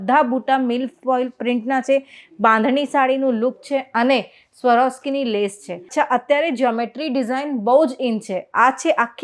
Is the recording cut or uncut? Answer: cut